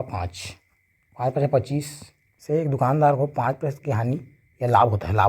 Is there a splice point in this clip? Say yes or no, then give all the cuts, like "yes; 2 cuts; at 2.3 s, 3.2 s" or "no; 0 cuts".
yes; 1 cut; at 2.3 s